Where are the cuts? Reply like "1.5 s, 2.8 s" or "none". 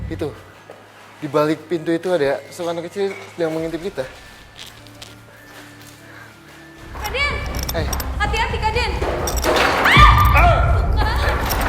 6.9 s